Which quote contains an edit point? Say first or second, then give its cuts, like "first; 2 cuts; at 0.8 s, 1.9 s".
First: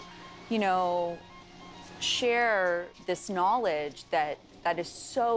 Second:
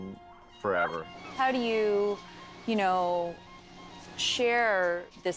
second; 1 cut; at 1.1 s